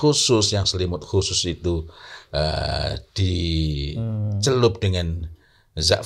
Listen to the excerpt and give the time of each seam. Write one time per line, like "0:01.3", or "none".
none